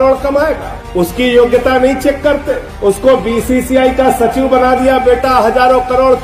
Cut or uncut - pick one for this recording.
uncut